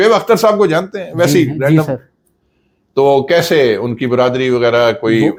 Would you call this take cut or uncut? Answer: uncut